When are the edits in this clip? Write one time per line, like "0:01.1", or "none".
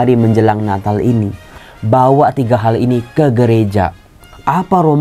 0:01.6